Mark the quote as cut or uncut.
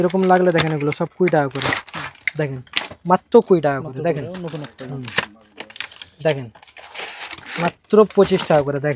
uncut